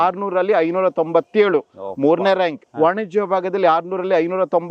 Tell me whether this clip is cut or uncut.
cut